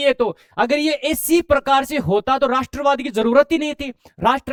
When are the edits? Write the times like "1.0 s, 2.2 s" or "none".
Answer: none